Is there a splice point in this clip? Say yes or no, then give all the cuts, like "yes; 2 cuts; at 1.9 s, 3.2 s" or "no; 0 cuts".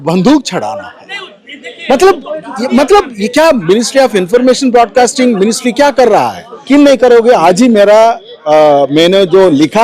yes; 1 cut; at 6.7 s